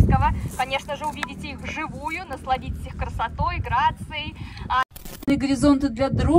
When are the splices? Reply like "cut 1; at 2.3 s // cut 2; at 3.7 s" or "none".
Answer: cut 1; at 5.3 s